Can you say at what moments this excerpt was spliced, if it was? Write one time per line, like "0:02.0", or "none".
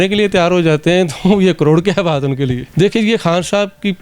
0:02.6

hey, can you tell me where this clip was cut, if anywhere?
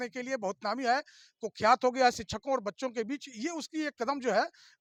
none

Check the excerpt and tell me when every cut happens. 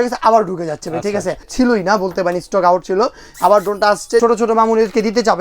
0:01.5
0:04.2

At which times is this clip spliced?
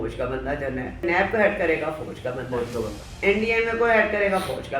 0:01.0
0:03.0

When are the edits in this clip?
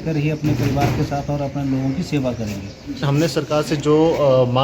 0:03.0

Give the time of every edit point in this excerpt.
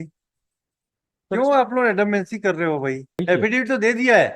0:03.2

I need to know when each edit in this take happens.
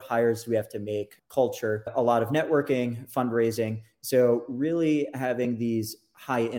0:01.2
0:01.9

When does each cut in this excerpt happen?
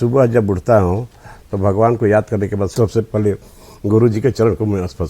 0:02.7

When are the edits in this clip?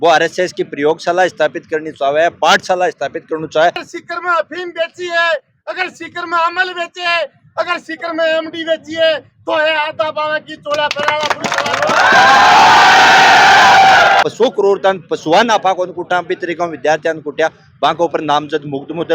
0:03.8
0:14.2

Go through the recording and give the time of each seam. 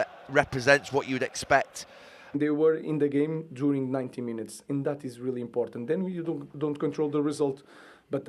0:02.3

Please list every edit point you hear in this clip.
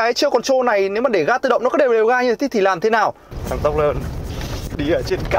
0:03.3

